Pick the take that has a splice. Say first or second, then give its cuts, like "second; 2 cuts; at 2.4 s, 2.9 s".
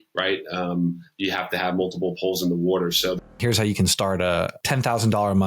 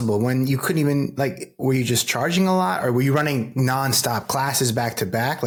first; 2 cuts; at 3.3 s, 4.6 s